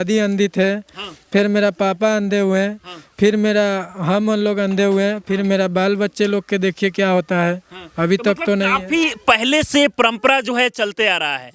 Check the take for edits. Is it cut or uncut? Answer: uncut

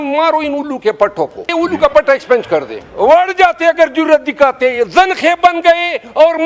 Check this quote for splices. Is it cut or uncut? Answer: cut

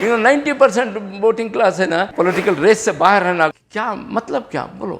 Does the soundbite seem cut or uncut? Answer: cut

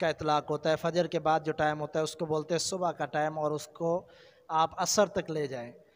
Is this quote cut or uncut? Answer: uncut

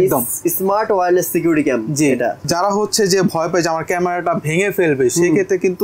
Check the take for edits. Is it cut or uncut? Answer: cut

